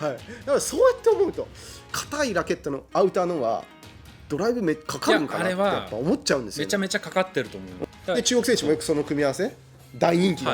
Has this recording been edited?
yes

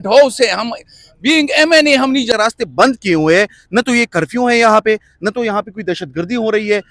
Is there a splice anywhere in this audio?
yes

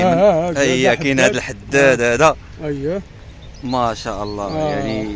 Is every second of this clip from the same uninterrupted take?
yes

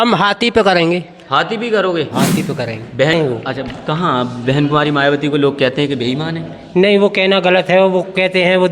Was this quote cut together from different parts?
yes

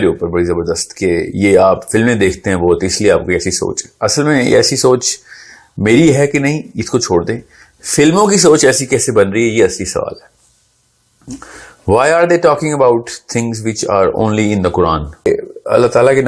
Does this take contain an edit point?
yes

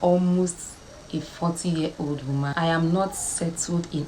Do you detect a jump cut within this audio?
yes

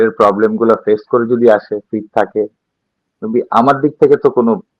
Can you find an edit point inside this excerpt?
no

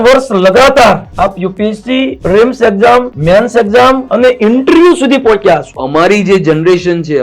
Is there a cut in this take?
yes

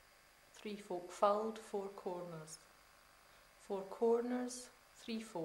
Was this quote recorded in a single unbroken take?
yes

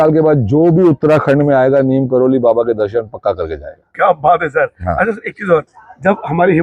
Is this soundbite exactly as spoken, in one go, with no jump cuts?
yes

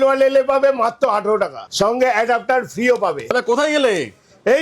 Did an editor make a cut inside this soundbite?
yes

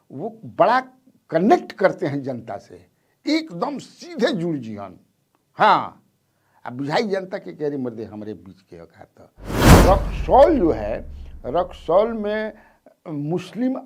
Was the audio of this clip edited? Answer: yes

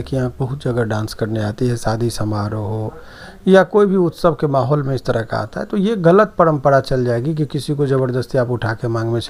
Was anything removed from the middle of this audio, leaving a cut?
no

